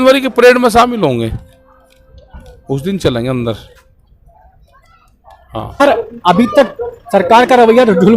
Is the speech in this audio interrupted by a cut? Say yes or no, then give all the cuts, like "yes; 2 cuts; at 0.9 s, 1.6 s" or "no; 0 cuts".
yes; 1 cut; at 5.8 s